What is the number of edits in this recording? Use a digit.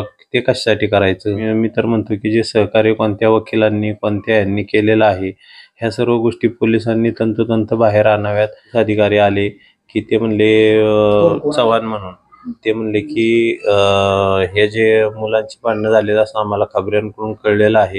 2